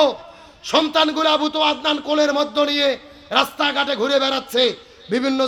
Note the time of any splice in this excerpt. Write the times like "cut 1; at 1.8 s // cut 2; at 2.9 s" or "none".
none